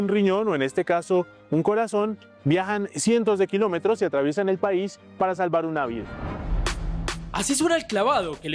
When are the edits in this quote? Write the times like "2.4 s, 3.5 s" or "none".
6.4 s